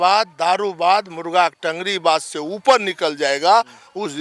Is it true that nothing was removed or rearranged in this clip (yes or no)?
yes